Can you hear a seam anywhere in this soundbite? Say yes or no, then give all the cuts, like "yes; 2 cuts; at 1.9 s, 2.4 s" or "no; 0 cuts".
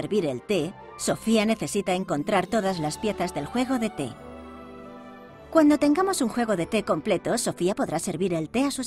no; 0 cuts